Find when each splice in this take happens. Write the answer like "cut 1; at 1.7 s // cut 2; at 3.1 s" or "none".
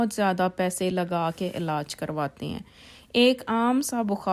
none